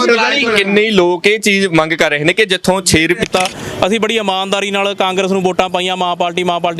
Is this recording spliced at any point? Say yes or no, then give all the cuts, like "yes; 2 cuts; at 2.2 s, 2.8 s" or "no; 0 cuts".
yes; 1 cut; at 3.3 s